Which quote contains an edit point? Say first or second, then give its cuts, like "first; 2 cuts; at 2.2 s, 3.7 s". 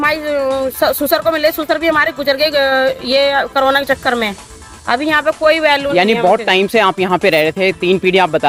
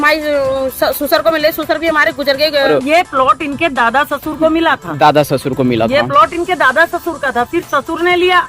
second; 1 cut; at 2.7 s